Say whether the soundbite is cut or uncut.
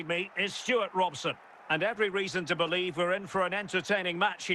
cut